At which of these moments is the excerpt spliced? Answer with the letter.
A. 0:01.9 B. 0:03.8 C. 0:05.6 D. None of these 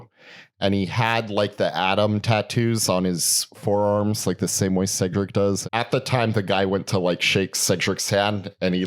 C